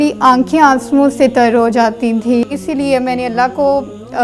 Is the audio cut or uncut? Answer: cut